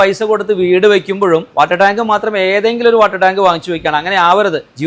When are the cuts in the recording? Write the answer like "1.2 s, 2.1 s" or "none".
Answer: 1.5 s